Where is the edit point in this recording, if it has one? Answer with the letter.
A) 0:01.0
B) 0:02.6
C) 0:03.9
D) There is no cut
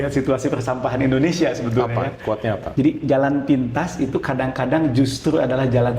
B